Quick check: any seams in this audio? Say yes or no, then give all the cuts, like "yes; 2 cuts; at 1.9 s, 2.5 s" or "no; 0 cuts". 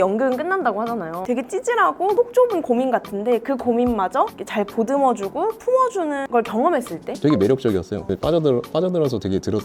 yes; 2 cuts; at 1.2 s, 7.1 s